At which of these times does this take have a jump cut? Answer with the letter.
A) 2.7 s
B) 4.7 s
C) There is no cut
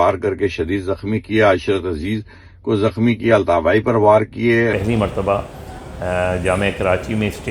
B